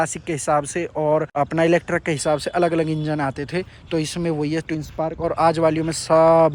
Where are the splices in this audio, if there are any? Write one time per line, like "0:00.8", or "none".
none